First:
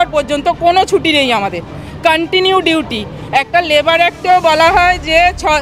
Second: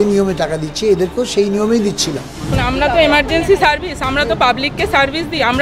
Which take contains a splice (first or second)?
second